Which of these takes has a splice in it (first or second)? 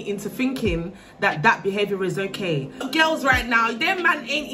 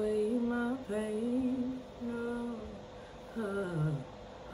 first